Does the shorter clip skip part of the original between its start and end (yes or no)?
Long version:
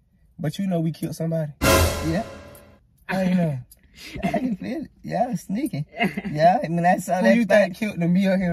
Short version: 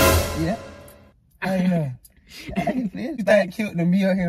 yes